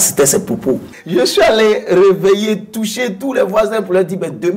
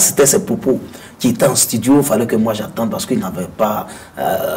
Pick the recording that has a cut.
first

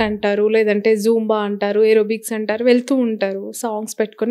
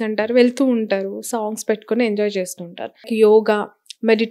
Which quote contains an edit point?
second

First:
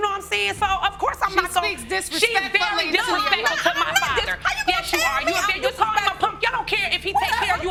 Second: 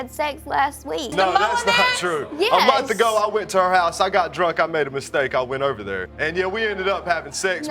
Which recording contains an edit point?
second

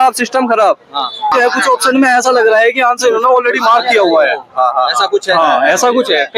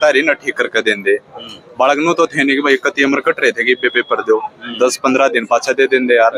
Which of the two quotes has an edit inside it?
first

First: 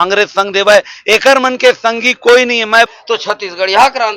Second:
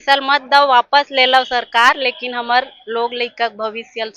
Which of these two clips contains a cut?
first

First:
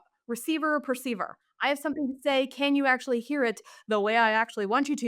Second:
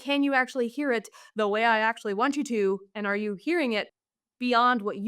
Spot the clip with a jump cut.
second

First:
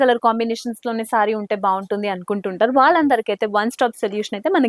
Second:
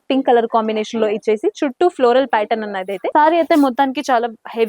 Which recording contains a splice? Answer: second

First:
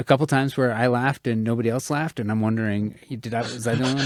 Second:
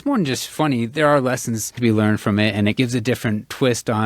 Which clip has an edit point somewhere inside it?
second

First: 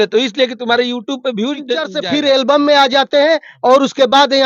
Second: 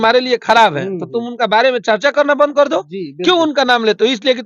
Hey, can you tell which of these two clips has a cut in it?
first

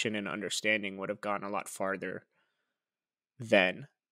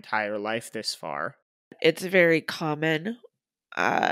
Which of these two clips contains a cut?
second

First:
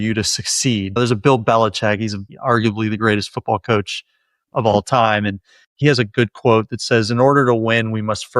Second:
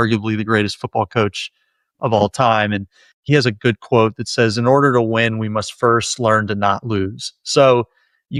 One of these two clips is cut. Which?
first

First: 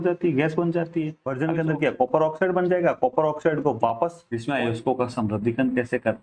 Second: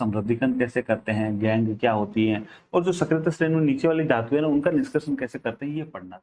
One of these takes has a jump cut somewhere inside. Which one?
first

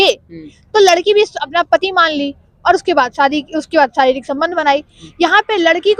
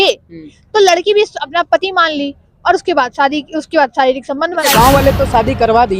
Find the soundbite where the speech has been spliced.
second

